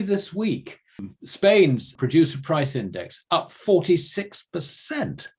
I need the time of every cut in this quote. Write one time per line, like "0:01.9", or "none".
0:01.0
0:01.9

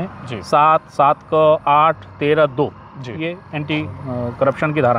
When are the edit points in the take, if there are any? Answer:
none

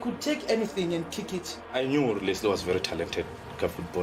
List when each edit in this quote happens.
0:01.6

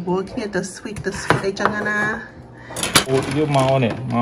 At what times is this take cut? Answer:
0:03.1

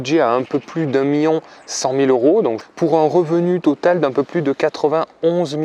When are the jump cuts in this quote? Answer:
0:02.6

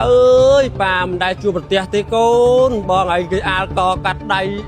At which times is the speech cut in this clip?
none

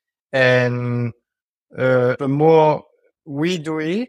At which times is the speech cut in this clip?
0:02.2

